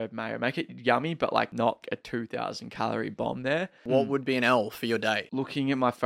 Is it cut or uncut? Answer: cut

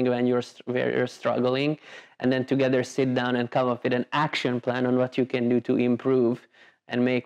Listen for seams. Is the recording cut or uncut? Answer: uncut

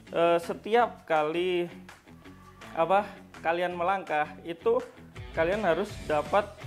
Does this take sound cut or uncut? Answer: uncut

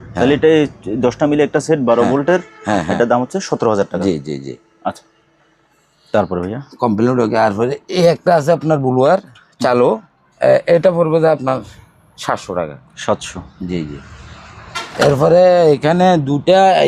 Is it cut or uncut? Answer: uncut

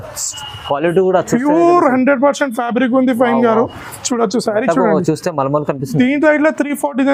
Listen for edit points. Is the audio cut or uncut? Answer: uncut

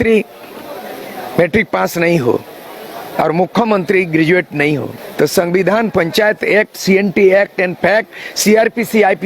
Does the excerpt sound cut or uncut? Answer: cut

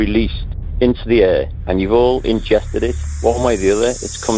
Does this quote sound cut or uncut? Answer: uncut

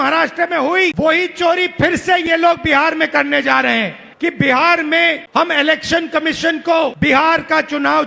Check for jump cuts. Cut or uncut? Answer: cut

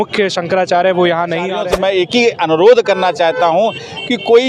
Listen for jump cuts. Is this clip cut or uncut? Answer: cut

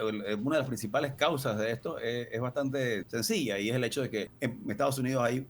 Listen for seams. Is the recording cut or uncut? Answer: cut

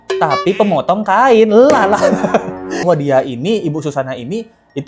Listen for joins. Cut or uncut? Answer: cut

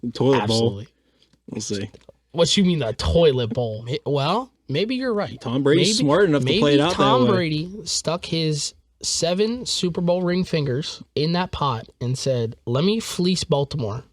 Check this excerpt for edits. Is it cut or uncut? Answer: cut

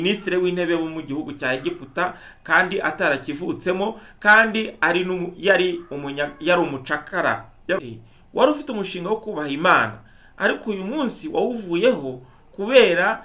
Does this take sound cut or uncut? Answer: cut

